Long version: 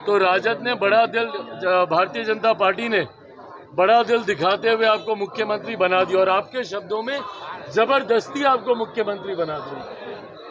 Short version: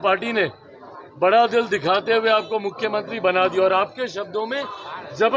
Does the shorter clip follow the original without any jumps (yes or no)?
yes